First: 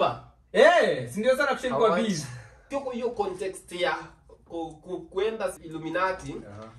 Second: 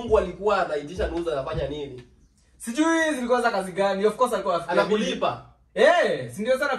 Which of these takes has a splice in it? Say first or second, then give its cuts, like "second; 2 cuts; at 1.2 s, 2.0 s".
first; 2 cuts; at 2.7 s, 5.6 s